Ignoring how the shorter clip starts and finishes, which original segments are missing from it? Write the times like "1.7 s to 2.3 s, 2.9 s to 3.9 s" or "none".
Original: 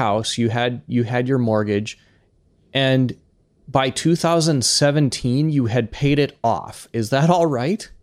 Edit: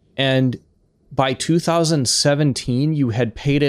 none